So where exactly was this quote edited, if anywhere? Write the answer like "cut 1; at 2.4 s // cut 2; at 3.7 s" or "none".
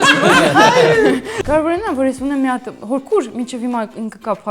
cut 1; at 1.4 s